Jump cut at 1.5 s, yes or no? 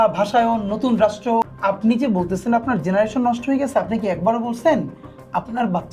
yes